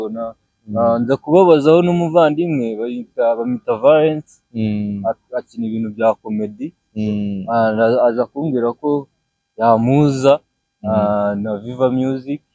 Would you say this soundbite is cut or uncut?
uncut